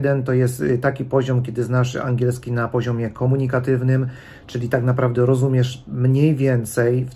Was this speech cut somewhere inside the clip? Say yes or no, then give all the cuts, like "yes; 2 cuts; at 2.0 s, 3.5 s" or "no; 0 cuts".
no; 0 cuts